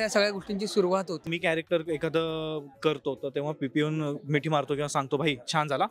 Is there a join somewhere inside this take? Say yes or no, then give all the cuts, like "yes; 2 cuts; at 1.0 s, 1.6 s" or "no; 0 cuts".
yes; 1 cut; at 1.3 s